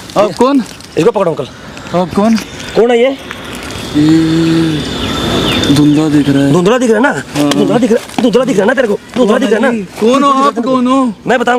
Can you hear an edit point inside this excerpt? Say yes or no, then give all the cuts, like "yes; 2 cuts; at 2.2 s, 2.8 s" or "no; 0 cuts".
no; 0 cuts